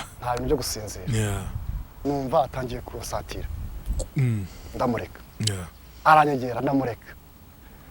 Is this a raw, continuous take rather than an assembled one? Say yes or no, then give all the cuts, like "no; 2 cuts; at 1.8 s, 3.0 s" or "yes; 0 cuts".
no; 1 cut; at 1.9 s